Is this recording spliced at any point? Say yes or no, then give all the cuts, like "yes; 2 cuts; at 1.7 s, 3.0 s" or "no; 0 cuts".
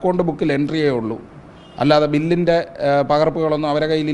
no; 0 cuts